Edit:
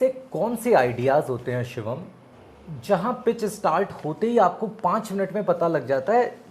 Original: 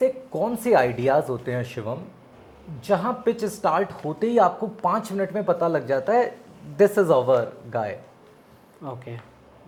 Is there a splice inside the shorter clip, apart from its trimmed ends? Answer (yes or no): no